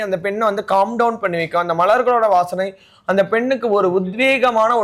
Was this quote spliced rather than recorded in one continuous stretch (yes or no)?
no